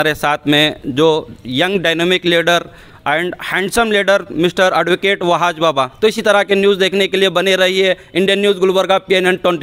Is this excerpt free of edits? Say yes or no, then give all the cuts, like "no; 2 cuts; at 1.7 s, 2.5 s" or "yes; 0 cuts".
yes; 0 cuts